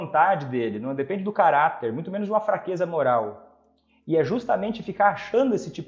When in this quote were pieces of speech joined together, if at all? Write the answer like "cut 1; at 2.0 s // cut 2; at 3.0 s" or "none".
none